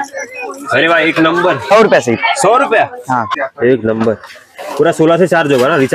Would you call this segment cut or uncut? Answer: cut